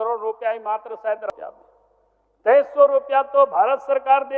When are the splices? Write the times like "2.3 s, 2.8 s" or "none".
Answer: 1.2 s